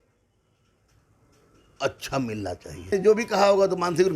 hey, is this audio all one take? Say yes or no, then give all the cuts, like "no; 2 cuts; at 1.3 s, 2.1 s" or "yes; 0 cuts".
no; 1 cut; at 2.9 s